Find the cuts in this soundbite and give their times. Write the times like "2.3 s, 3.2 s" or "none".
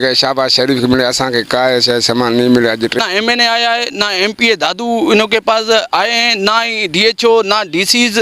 3.0 s